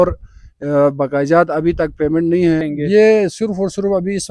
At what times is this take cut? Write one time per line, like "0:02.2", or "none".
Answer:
0:02.7